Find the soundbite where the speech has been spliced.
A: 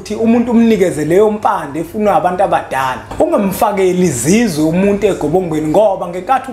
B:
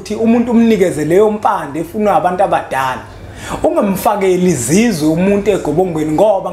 A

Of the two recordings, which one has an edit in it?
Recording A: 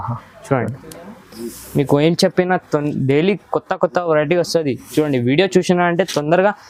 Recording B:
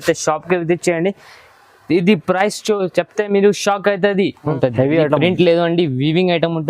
B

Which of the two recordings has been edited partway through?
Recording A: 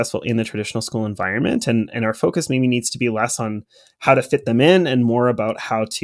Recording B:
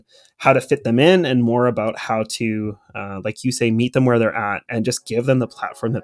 B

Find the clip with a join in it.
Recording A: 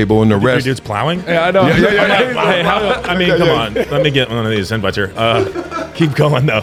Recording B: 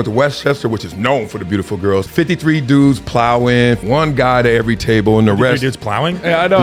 B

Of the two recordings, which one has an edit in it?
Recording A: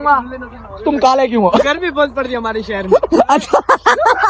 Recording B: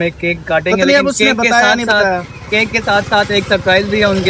A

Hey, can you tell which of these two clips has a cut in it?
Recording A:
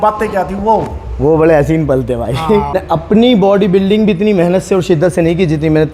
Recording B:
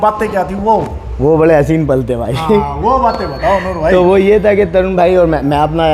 A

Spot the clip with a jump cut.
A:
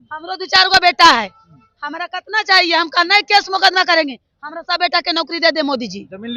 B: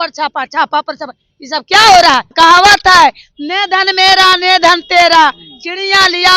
B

